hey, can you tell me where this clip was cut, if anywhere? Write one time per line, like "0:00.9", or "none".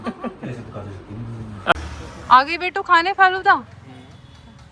0:01.7